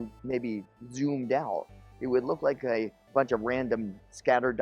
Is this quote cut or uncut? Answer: cut